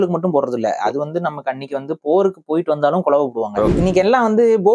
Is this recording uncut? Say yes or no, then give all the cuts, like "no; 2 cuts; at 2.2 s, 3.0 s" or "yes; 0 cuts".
no; 1 cut; at 3.8 s